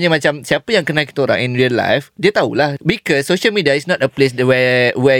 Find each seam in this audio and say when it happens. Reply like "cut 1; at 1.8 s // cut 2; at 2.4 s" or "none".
cut 1; at 2.7 s